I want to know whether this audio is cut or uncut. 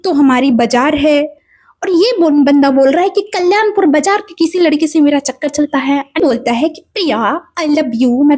cut